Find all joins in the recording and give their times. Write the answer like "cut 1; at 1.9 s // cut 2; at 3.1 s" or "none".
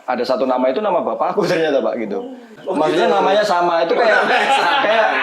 cut 1; at 2.5 s

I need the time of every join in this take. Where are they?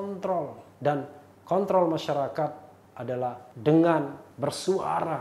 cut 1; at 0.8 s // cut 2; at 3.1 s // cut 3; at 4.2 s

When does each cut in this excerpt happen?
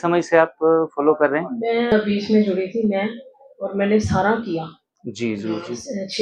cut 1; at 1.9 s

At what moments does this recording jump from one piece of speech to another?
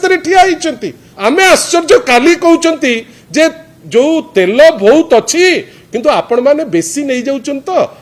cut 1; at 1.1 s

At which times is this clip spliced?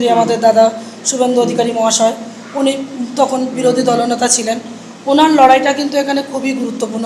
none

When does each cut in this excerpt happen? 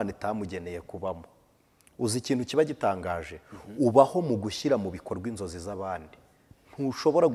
none

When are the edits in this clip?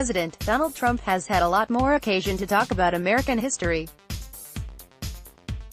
cut 1; at 4.0 s

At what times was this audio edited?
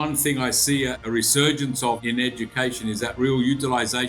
cut 1; at 1.0 s // cut 2; at 2.0 s

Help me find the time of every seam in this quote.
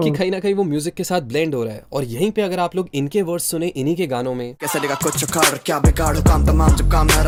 none

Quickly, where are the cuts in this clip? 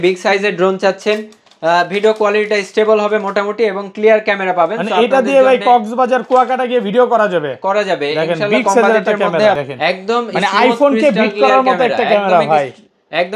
cut 1; at 9.6 s

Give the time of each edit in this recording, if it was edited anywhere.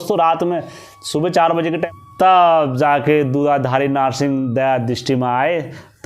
cut 1; at 1.8 s

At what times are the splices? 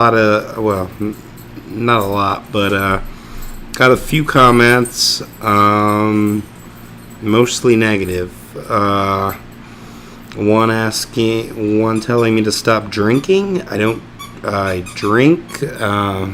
cut 1; at 10.8 s

